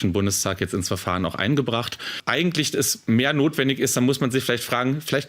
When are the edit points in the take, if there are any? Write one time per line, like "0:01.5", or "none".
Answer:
0:02.2